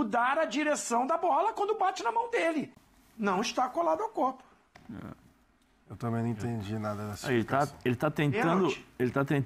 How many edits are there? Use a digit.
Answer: 1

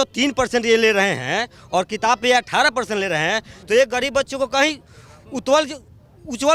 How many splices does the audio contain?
0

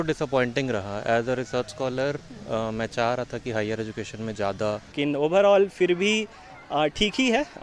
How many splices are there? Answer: 1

